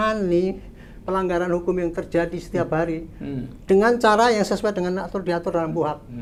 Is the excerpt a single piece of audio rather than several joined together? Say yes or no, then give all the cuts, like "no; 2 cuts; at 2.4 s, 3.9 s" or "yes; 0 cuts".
yes; 0 cuts